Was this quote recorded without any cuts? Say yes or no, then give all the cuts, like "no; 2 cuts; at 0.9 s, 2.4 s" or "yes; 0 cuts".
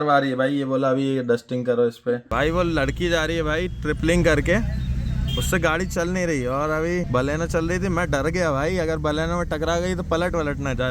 no; 2 cuts; at 2.3 s, 7.1 s